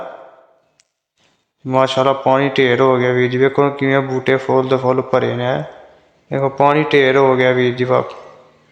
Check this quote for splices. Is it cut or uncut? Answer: uncut